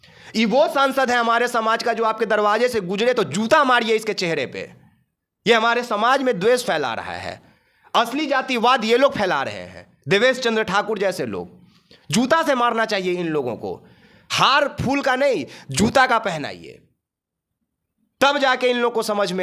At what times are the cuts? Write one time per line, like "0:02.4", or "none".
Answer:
none